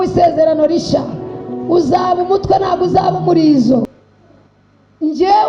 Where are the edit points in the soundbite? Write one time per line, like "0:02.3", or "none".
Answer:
0:03.9